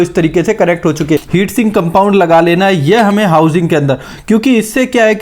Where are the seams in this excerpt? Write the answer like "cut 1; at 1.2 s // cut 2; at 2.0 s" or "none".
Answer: cut 1; at 1.2 s